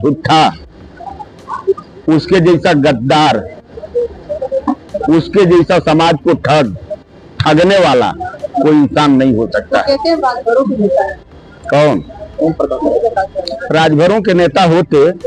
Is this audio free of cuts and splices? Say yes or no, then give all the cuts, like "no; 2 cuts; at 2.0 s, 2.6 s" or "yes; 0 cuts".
yes; 0 cuts